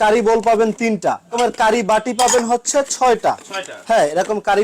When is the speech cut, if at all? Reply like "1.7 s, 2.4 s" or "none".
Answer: 1.3 s